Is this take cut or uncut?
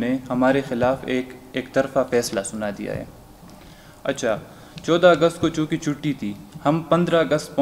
uncut